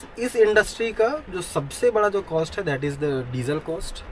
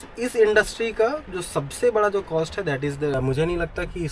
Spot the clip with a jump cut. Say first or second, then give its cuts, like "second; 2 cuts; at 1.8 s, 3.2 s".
second; 1 cut; at 3.1 s